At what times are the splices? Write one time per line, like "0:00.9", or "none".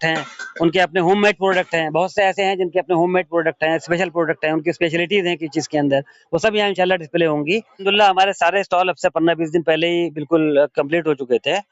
0:07.8